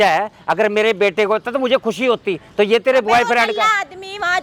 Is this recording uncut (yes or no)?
yes